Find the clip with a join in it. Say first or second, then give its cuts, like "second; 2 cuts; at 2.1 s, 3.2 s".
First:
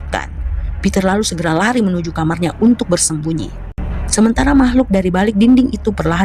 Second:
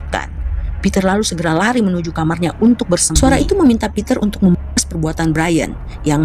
second; 1 cut; at 3.1 s